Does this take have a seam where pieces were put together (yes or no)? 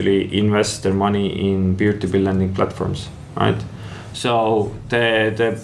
no